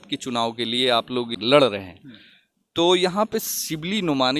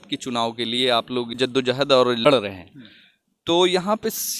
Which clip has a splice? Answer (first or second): first